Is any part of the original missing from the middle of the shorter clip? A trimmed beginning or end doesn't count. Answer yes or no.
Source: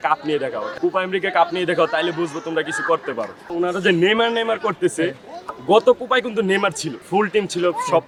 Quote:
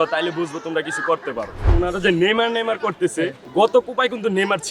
yes